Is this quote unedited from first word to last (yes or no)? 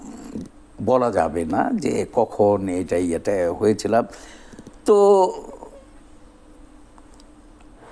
yes